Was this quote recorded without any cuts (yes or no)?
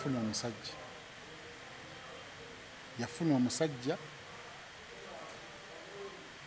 yes